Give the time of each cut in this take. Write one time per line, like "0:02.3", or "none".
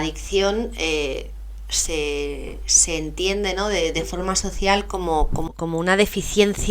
0:05.4